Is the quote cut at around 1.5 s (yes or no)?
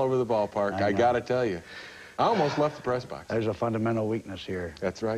no